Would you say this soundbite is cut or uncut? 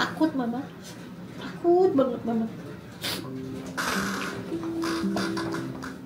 uncut